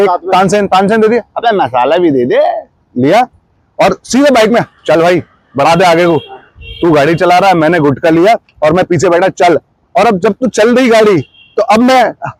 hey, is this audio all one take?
yes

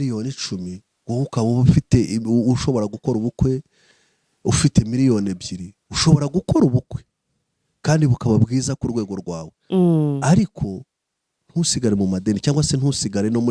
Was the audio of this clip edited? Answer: no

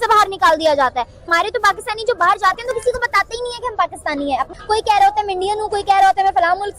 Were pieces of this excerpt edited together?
no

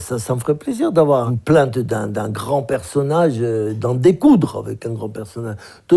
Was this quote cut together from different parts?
yes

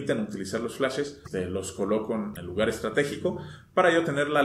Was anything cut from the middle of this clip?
yes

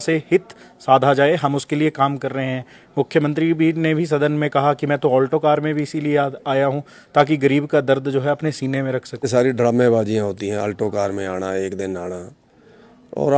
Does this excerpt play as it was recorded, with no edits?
no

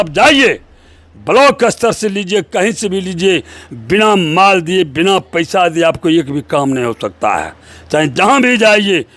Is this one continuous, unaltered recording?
yes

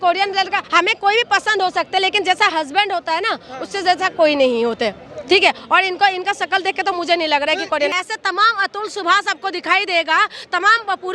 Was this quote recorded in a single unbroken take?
no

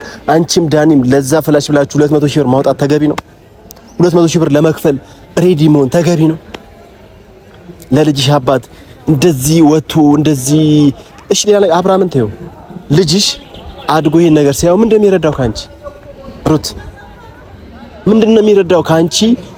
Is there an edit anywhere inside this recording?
no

